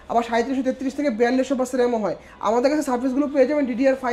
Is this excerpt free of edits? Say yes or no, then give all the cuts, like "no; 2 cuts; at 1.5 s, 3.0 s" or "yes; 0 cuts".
yes; 0 cuts